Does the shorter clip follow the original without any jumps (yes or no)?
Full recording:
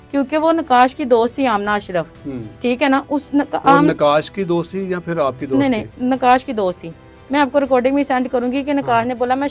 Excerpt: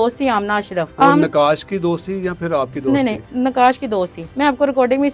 no